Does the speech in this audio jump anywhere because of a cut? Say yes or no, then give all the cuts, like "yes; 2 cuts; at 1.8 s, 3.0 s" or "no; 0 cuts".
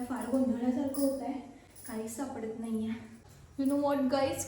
yes; 1 cut; at 3.4 s